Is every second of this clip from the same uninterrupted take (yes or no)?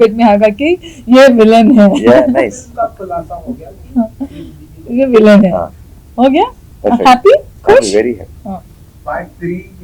yes